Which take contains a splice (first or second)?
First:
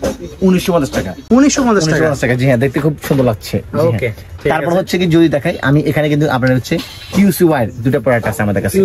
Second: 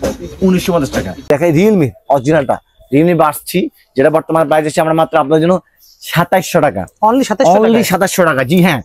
second